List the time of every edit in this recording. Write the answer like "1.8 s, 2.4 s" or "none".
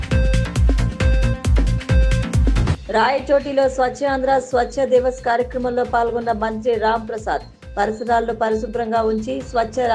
2.7 s